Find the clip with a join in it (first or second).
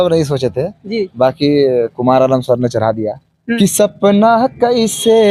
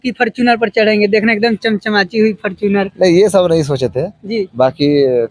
first